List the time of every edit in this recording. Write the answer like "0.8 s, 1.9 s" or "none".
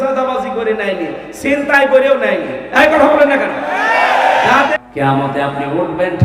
4.7 s